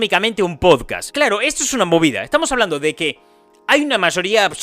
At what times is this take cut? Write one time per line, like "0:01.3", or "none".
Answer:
0:01.0